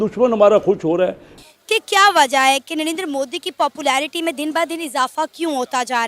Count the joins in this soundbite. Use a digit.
1